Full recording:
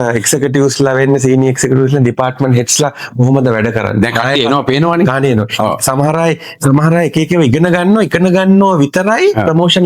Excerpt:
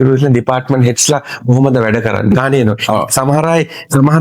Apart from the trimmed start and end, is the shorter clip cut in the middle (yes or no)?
yes